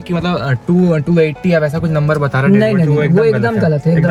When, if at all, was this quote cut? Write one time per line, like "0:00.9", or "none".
none